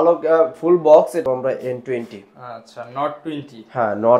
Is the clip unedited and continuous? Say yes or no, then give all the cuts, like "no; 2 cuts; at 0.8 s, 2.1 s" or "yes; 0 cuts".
no; 1 cut; at 1.2 s